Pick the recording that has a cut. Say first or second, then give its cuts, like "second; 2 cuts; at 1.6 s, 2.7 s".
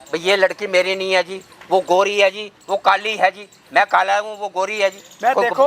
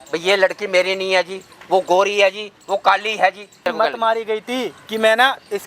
second; 1 cut; at 3.6 s